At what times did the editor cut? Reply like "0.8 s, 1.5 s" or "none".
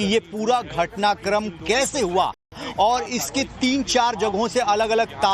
none